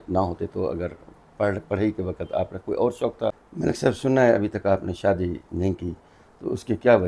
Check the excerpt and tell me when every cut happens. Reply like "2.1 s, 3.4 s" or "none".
3.5 s